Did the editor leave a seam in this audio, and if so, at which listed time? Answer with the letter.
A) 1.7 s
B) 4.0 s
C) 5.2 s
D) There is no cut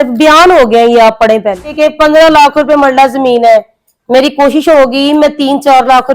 A